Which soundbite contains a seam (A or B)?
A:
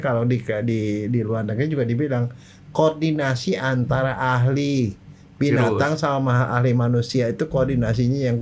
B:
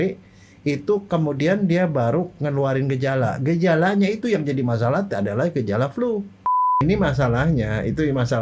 B